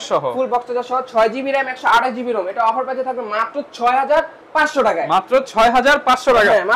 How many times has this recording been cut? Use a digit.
0